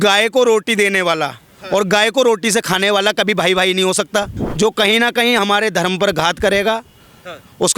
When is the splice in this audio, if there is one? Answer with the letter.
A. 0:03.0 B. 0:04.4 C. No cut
B